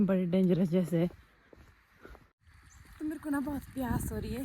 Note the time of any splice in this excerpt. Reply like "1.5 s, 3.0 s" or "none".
2.4 s